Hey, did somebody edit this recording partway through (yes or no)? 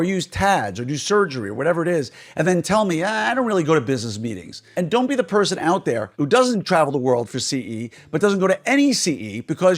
yes